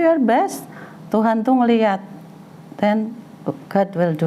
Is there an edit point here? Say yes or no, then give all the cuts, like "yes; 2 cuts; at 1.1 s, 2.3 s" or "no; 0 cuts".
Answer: no; 0 cuts